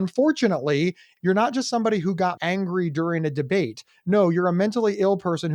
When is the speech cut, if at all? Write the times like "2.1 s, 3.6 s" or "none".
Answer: 1.1 s, 2.4 s